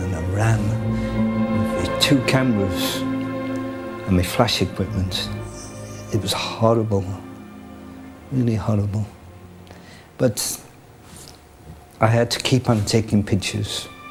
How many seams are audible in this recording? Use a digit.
0